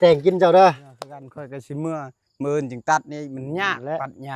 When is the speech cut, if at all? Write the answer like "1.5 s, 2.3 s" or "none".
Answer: 1.3 s